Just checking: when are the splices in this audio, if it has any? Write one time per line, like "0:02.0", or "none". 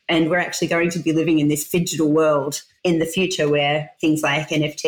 0:02.6
0:03.9